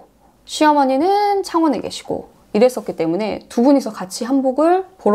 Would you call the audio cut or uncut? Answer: uncut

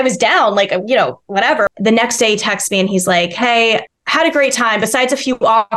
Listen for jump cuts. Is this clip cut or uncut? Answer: cut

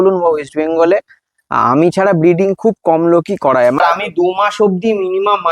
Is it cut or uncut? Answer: cut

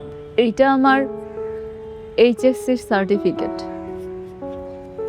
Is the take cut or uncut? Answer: cut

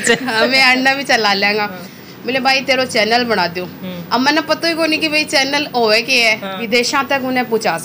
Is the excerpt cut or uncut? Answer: cut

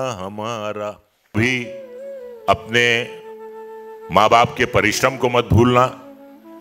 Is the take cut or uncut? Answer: cut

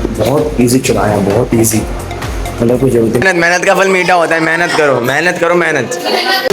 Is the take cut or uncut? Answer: cut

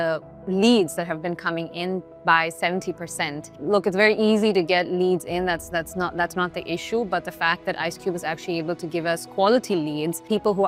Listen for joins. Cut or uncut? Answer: uncut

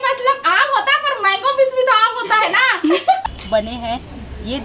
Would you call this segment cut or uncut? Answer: cut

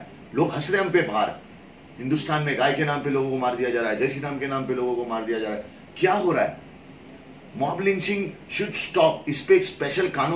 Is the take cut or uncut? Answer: uncut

